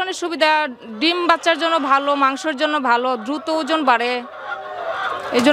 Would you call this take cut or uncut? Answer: uncut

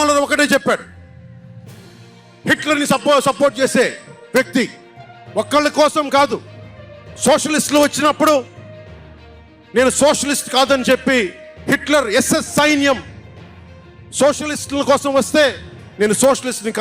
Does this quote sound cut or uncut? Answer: cut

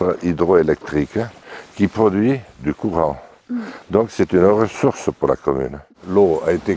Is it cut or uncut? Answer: cut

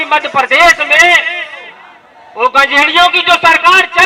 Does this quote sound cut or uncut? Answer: uncut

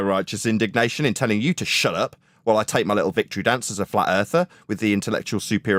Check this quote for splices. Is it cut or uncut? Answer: uncut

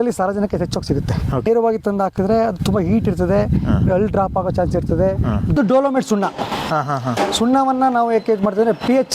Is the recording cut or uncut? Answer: cut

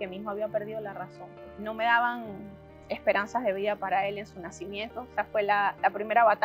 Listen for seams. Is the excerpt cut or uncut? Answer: cut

